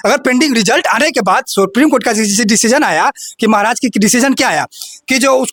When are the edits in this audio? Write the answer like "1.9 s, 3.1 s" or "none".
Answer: none